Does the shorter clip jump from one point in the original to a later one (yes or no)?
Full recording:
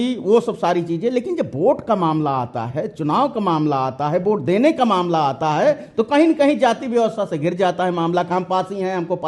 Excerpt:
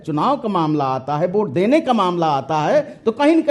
no